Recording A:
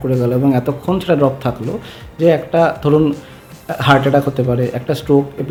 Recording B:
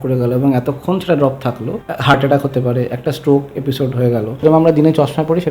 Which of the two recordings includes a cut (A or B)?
B